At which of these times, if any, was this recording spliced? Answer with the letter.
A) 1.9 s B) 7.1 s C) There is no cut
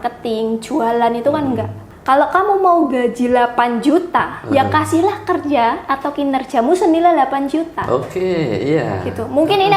A